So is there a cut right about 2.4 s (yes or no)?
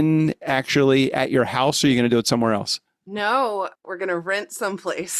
no